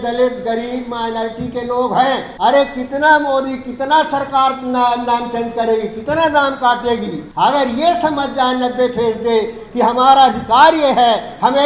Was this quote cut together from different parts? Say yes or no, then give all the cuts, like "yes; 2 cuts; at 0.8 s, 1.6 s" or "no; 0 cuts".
yes; 2 cuts; at 2.3 s, 7.2 s